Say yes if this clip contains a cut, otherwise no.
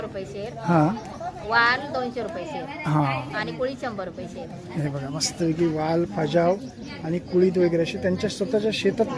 no